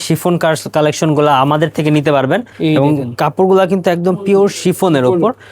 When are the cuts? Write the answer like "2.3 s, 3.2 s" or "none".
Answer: 2.5 s